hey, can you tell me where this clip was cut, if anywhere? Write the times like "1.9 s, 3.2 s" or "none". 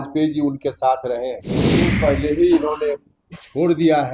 1.9 s